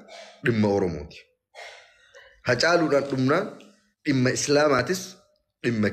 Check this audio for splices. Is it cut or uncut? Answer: uncut